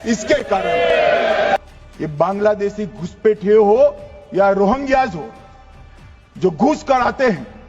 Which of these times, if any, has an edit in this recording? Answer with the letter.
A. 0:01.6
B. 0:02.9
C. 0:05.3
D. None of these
A